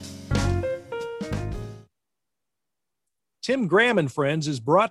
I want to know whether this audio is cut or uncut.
cut